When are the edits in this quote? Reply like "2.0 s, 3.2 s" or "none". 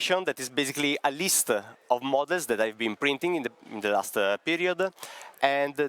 none